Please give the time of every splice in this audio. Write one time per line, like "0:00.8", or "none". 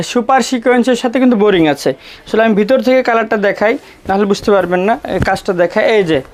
none